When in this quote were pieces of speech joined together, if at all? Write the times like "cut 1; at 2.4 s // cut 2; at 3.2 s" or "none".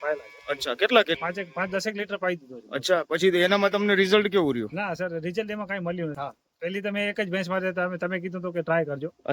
cut 1; at 1.2 s // cut 2; at 6.2 s